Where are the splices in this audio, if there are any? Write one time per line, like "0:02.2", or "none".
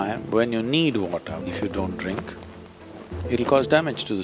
0:01.4